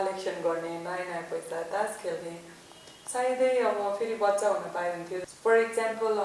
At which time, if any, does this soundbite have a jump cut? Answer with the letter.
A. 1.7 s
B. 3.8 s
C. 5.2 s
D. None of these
C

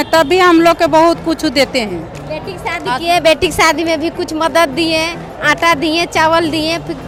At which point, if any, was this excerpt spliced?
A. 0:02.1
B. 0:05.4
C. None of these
C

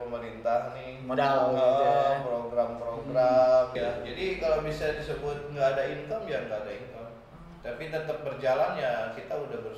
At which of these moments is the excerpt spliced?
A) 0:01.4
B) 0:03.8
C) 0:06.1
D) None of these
B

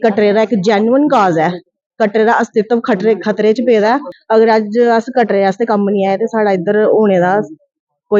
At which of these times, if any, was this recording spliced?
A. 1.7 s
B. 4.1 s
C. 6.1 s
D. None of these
B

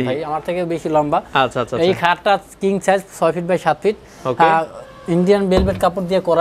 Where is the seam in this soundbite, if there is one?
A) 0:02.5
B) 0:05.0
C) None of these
C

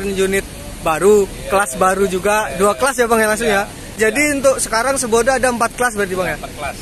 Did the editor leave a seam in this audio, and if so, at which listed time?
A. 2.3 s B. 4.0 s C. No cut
B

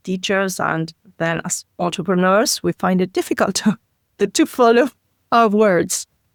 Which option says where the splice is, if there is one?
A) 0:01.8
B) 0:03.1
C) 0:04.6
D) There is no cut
D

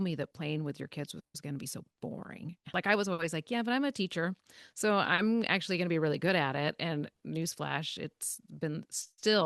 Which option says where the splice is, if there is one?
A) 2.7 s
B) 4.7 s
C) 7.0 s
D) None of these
A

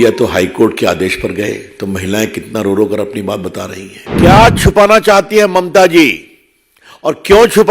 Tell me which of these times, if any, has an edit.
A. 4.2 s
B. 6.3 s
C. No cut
A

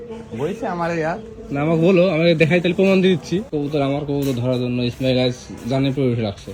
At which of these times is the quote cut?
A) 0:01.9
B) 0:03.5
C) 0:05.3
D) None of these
B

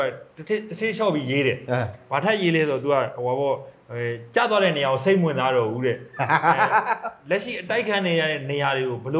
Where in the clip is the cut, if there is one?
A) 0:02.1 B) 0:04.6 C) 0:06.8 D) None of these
D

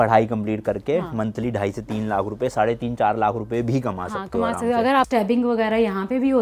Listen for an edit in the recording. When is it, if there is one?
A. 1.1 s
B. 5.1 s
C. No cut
B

